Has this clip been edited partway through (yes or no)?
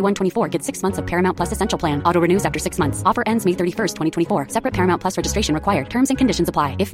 no